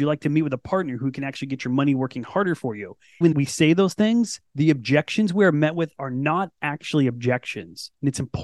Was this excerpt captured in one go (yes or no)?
no